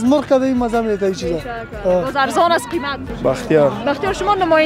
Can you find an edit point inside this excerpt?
yes; 1 cut; at 3.1 s

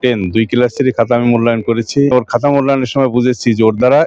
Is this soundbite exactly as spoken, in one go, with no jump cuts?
no; 1 cut; at 2.1 s

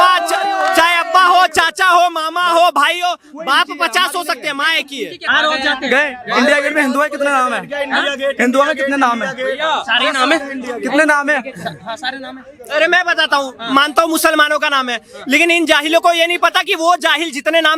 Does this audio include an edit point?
yes; 1 cut; at 5.2 s

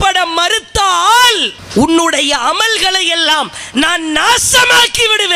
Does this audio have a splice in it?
no; 0 cuts

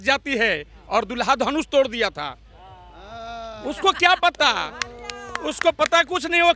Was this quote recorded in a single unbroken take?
yes; 0 cuts

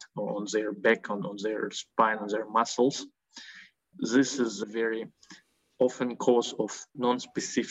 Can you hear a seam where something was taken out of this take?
yes; 1 cut; at 3.9 s

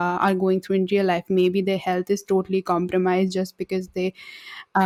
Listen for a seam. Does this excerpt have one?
no; 0 cuts

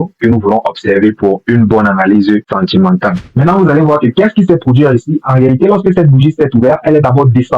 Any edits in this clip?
yes; 1 cut; at 3.3 s

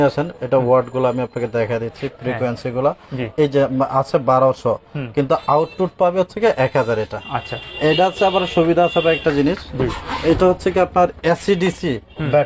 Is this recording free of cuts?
yes; 0 cuts

